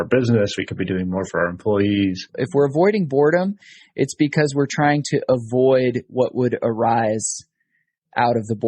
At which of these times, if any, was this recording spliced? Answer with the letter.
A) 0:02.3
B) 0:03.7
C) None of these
A